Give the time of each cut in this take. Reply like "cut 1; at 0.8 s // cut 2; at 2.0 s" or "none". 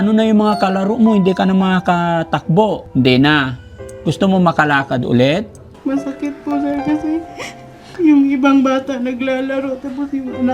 cut 1; at 2.8 s // cut 2; at 5.7 s